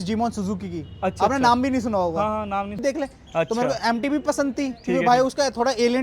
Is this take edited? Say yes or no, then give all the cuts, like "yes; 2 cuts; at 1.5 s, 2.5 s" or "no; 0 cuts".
yes; 1 cut; at 2.7 s